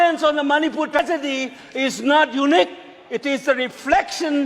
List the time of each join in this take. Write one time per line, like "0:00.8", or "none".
0:01.0